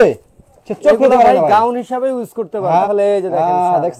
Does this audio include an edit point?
yes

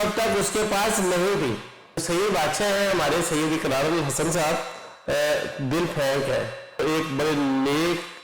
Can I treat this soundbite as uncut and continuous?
no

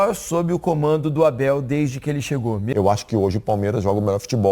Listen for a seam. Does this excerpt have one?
yes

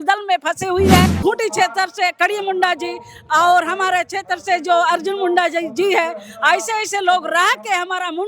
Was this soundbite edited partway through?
yes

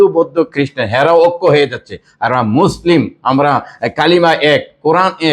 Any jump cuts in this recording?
no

